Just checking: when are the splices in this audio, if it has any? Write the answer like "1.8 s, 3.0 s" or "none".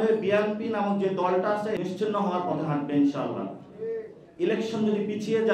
1.8 s, 4.2 s